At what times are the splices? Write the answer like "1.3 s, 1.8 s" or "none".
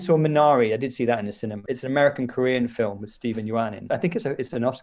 1.7 s, 3.8 s